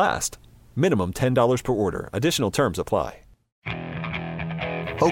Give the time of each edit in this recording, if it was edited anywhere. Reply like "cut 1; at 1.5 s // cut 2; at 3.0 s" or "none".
cut 1; at 3.5 s